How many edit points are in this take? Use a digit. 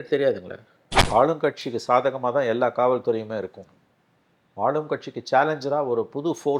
1